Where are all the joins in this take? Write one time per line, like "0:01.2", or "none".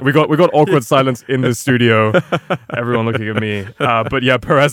none